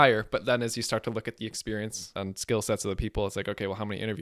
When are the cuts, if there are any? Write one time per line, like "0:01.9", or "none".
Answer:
0:02.0